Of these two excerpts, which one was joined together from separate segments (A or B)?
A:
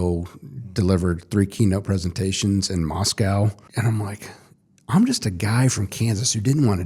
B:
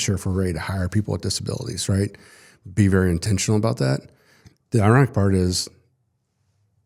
A